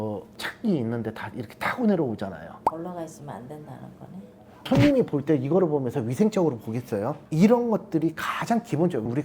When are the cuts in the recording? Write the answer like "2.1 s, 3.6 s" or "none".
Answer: 7.2 s